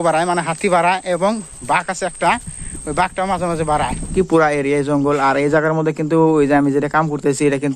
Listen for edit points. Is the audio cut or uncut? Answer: cut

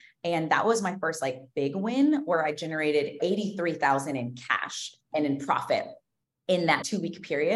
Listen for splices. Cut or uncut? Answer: cut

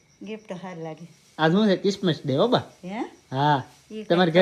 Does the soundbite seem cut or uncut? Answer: uncut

